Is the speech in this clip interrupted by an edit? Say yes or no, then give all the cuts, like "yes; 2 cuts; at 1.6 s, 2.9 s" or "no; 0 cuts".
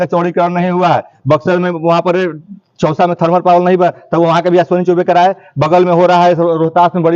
no; 0 cuts